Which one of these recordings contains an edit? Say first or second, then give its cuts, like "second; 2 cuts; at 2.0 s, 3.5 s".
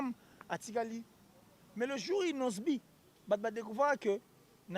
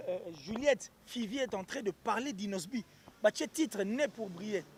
first; 1 cut; at 1.6 s